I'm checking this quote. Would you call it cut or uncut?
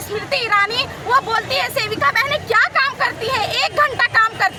uncut